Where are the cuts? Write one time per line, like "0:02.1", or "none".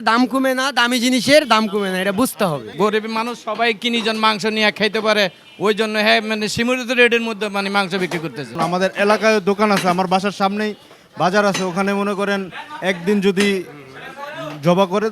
0:02.7
0:08.5